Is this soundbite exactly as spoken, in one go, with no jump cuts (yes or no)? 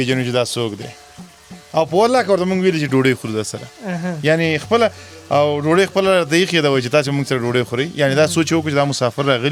yes